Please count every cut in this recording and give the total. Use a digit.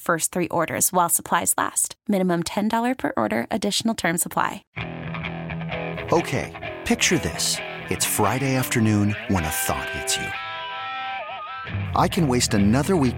1